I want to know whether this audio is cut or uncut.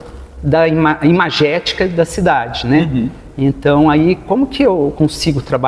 uncut